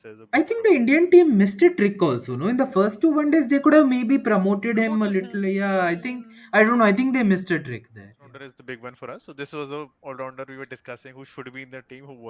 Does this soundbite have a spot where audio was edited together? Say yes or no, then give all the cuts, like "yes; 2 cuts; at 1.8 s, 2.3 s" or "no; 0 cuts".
yes; 1 cut; at 8.5 s